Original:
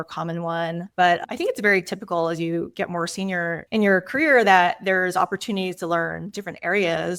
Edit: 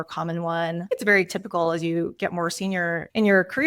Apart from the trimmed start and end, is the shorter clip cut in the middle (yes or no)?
yes